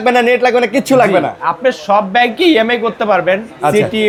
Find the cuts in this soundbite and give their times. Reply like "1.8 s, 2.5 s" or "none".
none